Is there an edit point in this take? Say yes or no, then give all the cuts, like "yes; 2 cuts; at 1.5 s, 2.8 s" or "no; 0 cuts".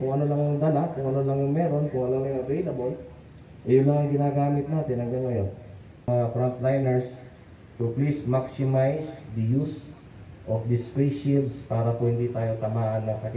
yes; 1 cut; at 6.1 s